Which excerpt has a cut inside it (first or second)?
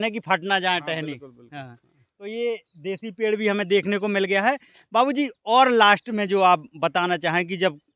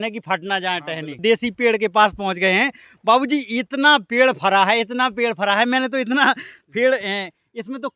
second